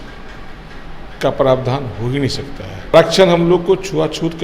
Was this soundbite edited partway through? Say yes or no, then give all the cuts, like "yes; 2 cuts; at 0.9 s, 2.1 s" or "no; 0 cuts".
yes; 1 cut; at 2.9 s